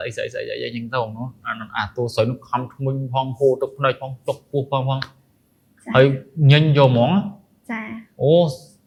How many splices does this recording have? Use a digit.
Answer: 0